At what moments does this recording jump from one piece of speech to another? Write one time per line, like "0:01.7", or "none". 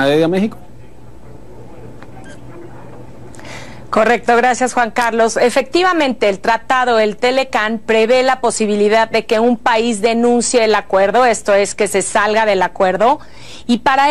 0:02.8